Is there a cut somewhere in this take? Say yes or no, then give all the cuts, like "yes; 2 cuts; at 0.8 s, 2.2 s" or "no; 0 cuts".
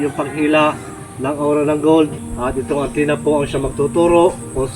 yes; 1 cut; at 2.3 s